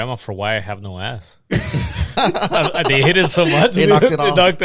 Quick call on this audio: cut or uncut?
uncut